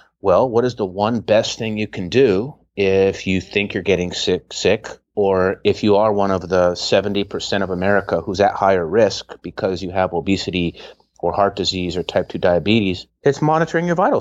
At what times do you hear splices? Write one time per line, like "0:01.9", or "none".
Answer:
0:13.1